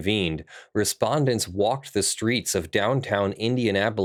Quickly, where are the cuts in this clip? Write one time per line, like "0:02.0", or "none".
none